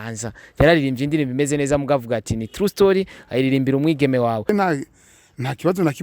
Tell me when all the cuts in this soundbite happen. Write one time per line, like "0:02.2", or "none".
0:04.5